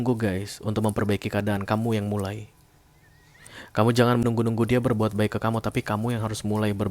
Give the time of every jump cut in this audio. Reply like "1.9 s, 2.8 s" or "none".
4.2 s

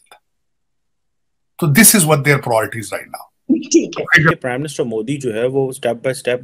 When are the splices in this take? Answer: 4.3 s

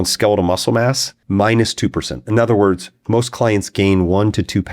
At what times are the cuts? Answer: 1.1 s, 2.9 s

